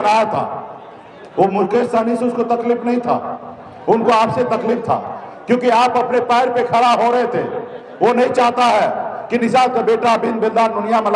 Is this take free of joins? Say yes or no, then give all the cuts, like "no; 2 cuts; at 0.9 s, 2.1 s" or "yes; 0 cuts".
yes; 0 cuts